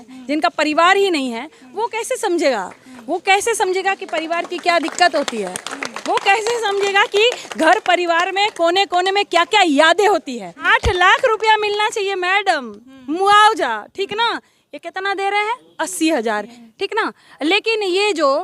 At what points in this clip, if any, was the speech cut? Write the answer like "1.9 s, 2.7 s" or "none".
10.6 s, 16.5 s